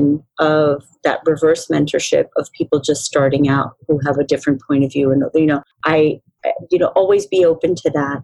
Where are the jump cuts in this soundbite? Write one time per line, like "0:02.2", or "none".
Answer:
0:05.7